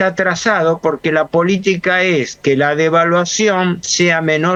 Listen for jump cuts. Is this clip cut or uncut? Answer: uncut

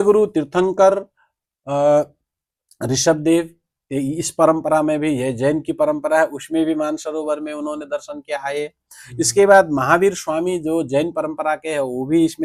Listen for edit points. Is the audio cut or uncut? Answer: uncut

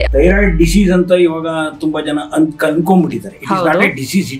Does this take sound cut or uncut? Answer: uncut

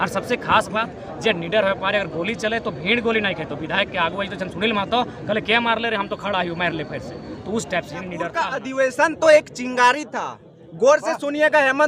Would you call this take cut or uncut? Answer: cut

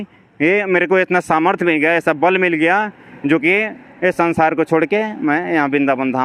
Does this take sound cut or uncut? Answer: uncut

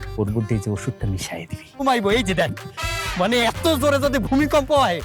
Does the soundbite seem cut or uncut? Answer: cut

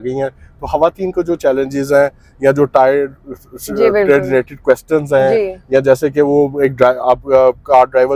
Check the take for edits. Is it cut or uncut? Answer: uncut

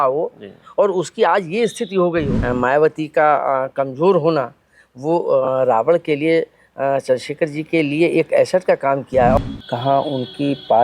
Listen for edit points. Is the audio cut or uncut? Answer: cut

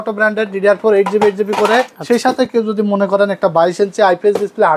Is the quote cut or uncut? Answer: cut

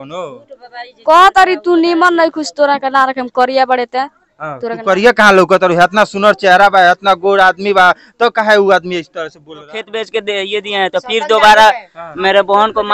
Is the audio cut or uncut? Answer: cut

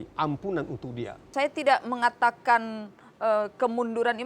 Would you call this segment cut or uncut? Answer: cut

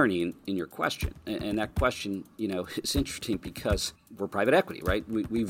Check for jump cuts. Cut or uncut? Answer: cut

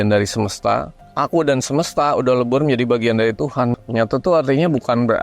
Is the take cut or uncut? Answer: cut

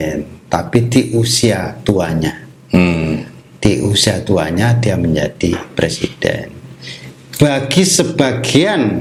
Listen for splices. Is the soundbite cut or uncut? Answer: uncut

